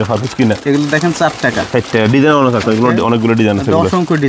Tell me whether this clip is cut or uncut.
uncut